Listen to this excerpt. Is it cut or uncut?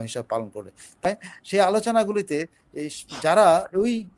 cut